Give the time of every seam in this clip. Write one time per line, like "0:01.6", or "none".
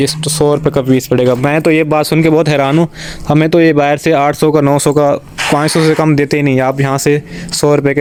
none